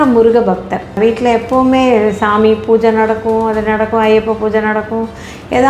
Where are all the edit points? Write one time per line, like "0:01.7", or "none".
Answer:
0:01.0